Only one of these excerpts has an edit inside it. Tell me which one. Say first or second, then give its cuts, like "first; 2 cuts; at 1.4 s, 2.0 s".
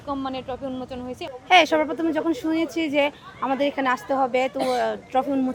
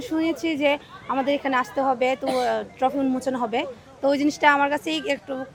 first; 1 cut; at 1.3 s